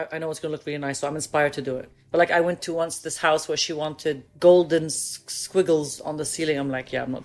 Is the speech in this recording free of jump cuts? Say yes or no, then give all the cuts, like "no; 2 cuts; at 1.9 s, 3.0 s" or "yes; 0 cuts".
no; 2 cuts; at 1.9 s, 4.2 s